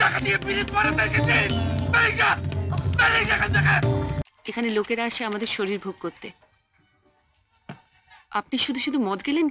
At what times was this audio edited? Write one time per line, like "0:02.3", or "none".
0:04.2